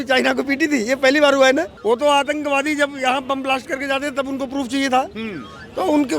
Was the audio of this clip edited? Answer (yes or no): yes